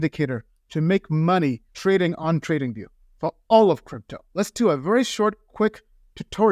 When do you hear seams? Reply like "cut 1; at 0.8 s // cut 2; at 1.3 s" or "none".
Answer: cut 1; at 4.2 s